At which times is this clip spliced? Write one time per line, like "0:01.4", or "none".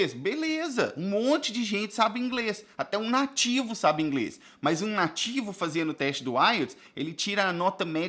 none

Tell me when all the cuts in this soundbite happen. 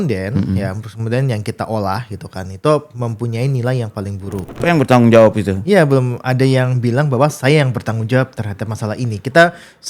0:04.6

